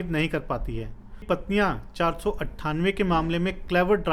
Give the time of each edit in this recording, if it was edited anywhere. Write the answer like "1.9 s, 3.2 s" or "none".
1.2 s